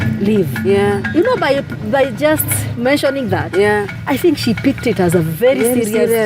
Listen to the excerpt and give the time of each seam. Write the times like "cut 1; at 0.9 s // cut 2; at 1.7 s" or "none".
cut 1; at 3.9 s